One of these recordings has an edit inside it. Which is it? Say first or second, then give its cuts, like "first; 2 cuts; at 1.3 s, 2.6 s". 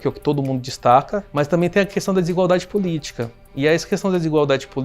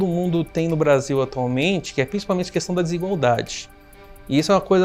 first; 1 cut; at 1.2 s